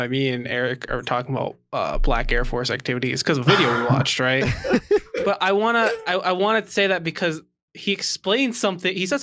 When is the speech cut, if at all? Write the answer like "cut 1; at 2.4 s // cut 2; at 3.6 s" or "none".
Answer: none